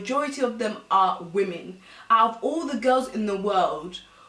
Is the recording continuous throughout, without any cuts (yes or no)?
yes